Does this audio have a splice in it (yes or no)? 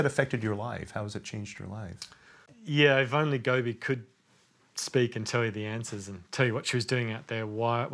yes